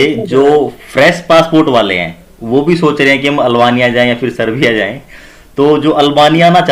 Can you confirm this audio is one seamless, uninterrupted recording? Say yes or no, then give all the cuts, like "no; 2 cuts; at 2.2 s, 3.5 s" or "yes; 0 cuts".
yes; 0 cuts